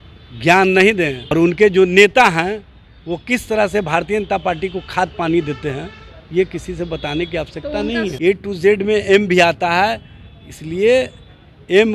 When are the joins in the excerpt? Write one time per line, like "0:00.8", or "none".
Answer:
0:01.3
0:08.1